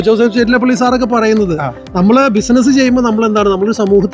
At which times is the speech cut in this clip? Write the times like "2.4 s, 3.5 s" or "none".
none